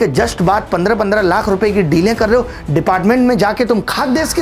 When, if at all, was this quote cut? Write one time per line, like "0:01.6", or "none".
none